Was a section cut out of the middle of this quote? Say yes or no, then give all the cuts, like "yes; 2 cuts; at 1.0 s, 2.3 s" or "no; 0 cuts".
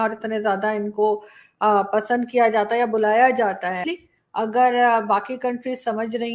yes; 1 cut; at 3.8 s